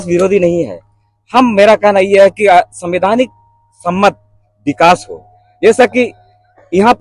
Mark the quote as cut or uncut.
uncut